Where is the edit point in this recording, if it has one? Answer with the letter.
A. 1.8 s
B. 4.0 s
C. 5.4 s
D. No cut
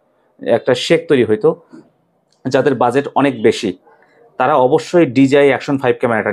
A